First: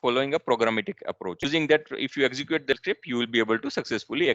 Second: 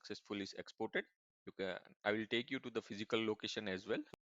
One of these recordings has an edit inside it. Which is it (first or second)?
first